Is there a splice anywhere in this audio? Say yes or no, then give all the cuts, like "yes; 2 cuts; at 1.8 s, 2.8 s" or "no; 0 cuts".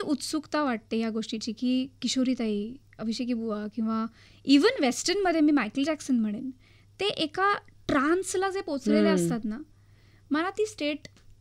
no; 0 cuts